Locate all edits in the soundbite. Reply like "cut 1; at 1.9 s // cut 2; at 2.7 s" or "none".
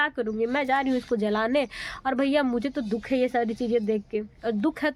none